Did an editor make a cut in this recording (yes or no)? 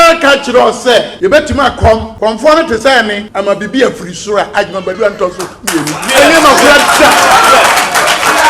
yes